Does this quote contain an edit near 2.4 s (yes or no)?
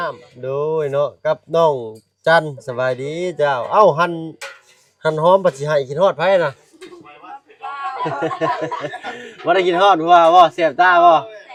no